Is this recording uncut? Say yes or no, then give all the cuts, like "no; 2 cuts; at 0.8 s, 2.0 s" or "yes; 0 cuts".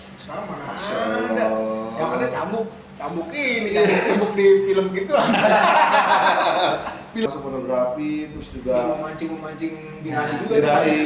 no; 1 cut; at 7.2 s